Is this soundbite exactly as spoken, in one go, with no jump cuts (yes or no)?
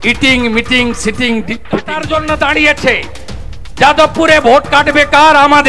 no